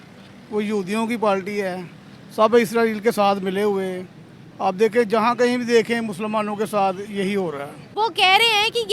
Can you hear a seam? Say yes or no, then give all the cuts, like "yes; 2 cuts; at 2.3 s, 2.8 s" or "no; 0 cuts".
yes; 1 cut; at 7.8 s